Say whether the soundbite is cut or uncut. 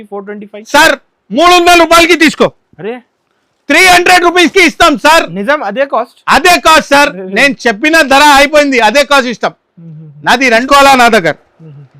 cut